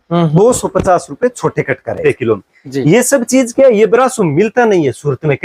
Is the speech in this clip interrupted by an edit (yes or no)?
yes